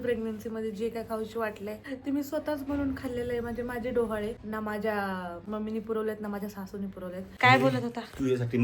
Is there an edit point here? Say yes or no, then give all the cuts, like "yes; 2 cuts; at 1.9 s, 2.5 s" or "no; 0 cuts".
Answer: yes; 4 cuts; at 1.9 s, 4.4 s, 5.4 s, 7.2 s